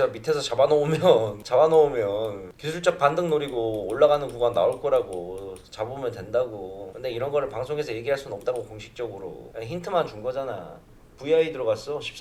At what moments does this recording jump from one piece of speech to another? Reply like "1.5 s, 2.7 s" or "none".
none